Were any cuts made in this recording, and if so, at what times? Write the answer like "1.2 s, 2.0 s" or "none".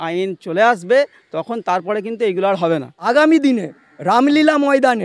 2.9 s